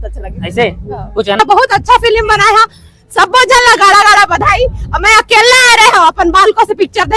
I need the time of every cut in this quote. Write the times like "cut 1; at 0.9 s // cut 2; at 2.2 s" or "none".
cut 1; at 1.4 s